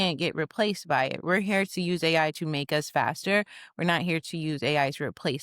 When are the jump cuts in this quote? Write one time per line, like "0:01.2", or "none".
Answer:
0:01.2